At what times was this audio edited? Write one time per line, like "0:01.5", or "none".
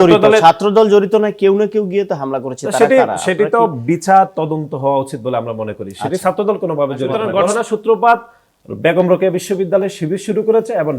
0:07.2